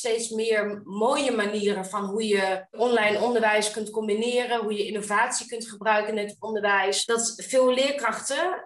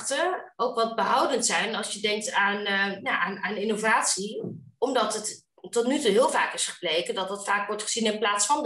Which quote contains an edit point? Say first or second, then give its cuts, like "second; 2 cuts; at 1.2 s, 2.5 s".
first; 2 cuts; at 2.8 s, 7.0 s